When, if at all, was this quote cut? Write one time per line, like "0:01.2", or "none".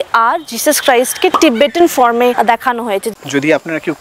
0:03.0